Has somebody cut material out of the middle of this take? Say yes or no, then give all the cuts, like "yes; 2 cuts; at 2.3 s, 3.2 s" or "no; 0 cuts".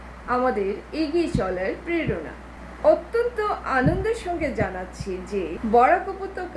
yes; 1 cut; at 5.6 s